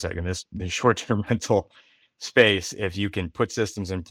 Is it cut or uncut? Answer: uncut